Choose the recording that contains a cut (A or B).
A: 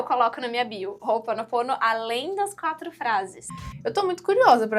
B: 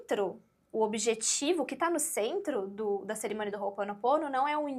A